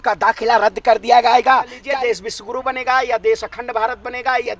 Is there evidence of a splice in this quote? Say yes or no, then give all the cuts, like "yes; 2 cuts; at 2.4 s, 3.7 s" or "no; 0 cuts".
yes; 1 cut; at 1.8 s